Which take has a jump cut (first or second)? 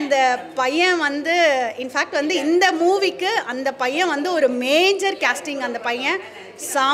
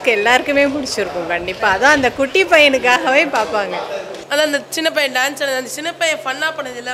second